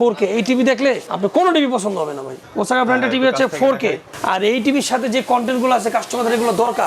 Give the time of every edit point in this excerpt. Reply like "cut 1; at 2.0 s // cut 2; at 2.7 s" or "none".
cut 1; at 1.1 s // cut 2; at 2.4 s // cut 3; at 4.0 s